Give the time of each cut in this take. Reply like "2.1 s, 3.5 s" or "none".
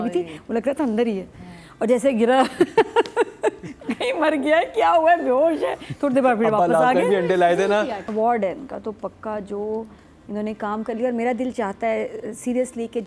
8.0 s